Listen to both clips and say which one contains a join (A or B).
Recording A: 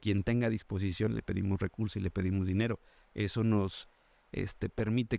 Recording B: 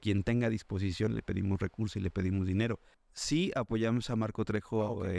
B